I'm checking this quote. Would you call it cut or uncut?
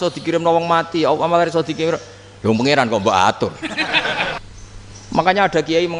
cut